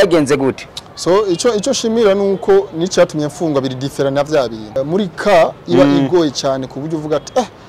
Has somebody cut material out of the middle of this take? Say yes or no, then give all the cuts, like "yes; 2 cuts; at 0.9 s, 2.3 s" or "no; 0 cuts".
yes; 1 cut; at 4.7 s